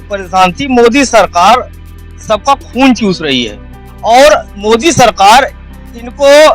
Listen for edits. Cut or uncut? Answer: uncut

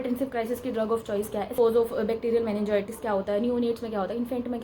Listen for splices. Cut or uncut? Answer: cut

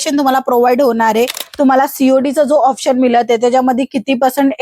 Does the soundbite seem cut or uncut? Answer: cut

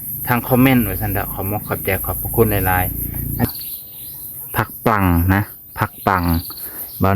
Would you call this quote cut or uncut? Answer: cut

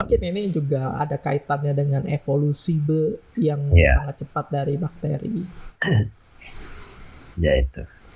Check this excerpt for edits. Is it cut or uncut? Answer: uncut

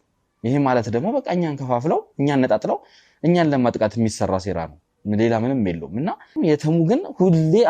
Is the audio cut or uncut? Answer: cut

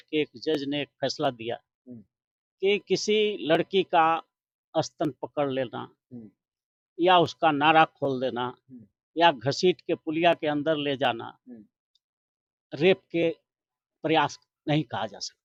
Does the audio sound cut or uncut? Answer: uncut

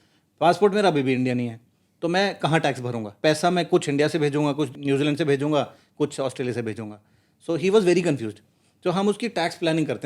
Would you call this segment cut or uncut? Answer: cut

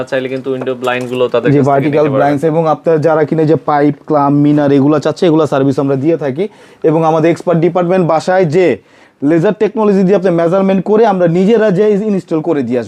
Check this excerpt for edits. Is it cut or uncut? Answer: uncut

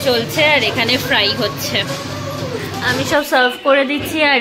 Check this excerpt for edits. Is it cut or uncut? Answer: cut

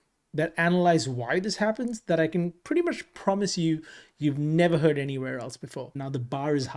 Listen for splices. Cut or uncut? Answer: cut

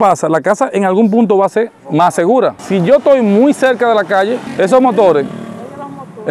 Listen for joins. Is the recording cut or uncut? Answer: cut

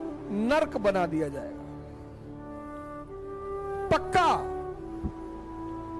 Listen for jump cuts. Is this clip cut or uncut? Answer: uncut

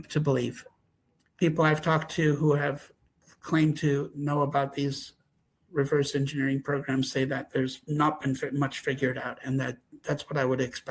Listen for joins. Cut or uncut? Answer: cut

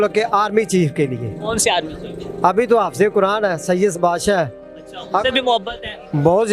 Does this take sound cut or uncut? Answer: uncut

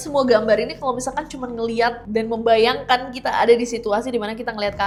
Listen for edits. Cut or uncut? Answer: uncut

